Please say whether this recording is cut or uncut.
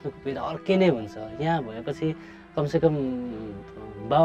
uncut